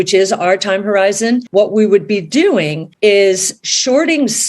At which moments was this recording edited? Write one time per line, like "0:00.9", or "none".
0:01.5
0:02.8